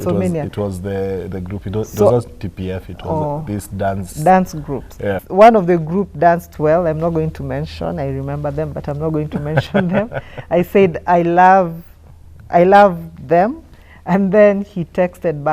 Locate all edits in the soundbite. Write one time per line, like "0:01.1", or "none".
0:05.2